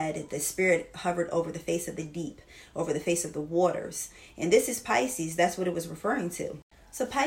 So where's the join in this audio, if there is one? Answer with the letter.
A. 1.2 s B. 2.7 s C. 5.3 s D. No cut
D